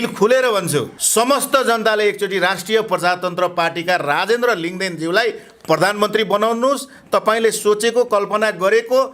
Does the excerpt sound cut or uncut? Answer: cut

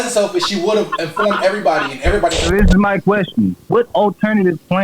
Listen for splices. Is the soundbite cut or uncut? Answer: cut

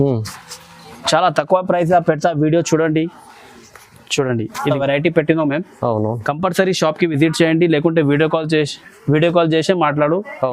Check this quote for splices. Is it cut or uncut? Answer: cut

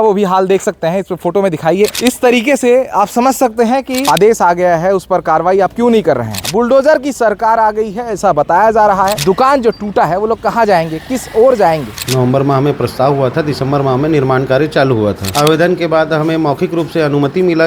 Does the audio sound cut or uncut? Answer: cut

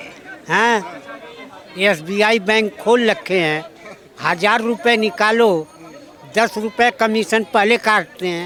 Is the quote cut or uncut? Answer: uncut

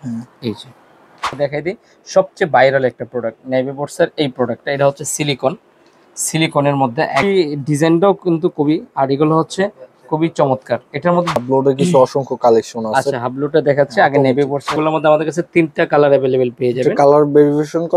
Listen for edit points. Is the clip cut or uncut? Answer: cut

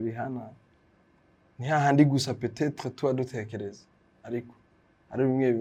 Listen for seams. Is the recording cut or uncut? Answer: uncut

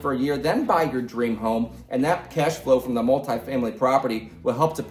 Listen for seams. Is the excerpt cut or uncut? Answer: uncut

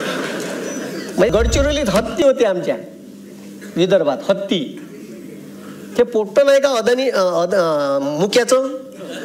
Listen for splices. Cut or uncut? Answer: cut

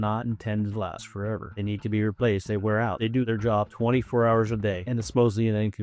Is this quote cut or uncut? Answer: cut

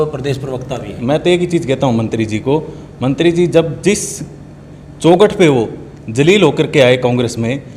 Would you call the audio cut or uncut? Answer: cut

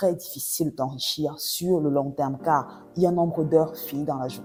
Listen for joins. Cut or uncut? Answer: uncut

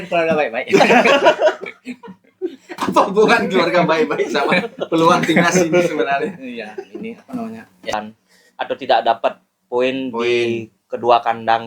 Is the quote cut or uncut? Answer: cut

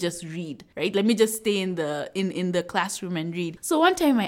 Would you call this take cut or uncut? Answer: uncut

